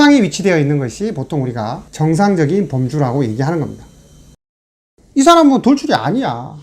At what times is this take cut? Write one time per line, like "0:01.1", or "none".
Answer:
0:04.6